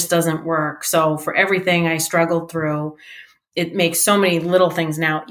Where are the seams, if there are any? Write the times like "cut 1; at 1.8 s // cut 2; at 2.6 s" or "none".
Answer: none